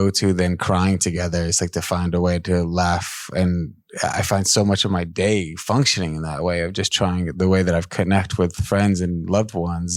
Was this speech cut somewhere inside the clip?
no; 0 cuts

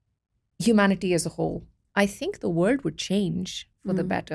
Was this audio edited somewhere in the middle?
no; 0 cuts

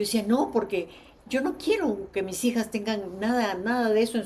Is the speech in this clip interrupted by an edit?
no; 0 cuts

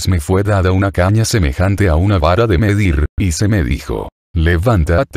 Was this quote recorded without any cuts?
no; 1 cut; at 1.0 s

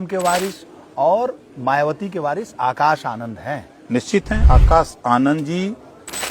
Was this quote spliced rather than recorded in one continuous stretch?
yes; 1 cut; at 4.4 s

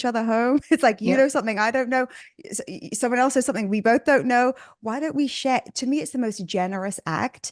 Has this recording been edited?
no; 0 cuts

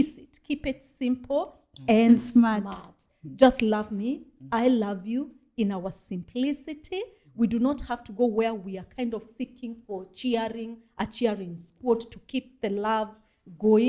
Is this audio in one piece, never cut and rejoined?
yes; 0 cuts

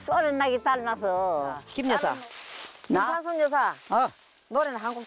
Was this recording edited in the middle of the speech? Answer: yes; 1 cut; at 1.7 s

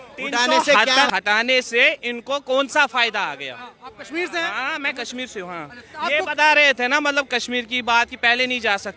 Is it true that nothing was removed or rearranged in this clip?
no; 1 cut; at 1.1 s

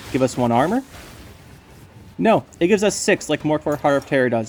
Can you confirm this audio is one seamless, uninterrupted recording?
yes; 0 cuts

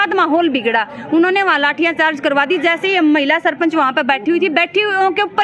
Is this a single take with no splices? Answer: yes; 0 cuts

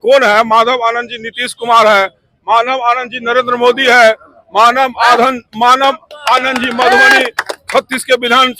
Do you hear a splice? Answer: no; 0 cuts

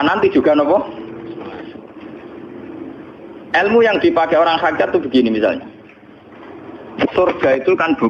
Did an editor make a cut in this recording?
no; 0 cuts

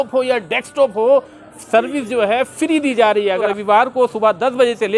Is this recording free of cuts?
no; 1 cut; at 3.5 s

